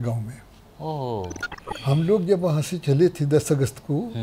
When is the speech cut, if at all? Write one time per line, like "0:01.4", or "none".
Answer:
0:01.5